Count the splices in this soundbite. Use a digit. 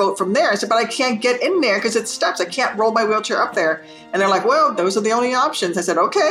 0